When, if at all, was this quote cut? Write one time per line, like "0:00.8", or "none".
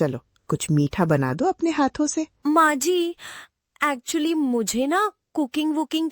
0:02.3